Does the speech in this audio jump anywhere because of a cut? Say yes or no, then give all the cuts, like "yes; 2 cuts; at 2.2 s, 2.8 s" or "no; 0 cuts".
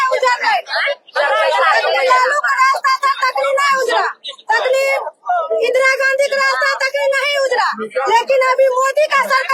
no; 0 cuts